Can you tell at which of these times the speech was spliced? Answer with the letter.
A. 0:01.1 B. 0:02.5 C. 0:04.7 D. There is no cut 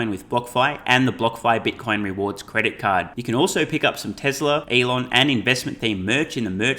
C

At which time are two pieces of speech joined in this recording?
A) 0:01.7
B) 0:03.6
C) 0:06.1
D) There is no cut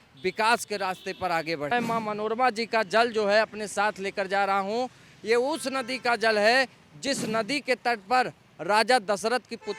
A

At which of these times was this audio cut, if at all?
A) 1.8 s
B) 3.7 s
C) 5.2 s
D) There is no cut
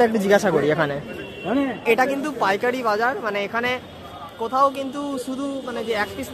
A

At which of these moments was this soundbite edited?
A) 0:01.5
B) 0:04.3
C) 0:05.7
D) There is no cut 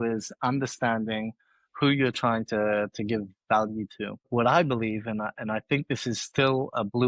B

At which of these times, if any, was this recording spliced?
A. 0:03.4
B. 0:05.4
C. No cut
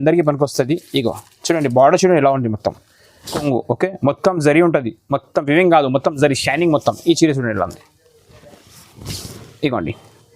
A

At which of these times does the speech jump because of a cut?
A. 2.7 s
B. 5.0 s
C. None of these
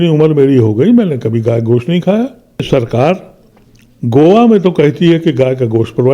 A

